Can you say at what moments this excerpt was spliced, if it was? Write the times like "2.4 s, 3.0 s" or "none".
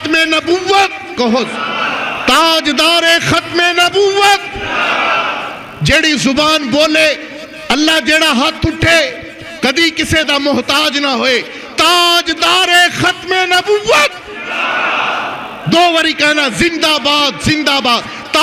none